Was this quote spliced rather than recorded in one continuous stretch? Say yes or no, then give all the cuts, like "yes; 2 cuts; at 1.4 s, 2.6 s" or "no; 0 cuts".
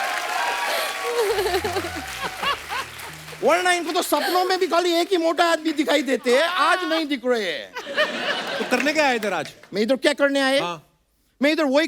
no; 0 cuts